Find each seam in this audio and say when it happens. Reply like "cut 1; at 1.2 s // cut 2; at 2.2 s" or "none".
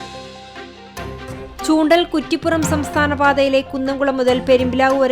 cut 1; at 1.4 s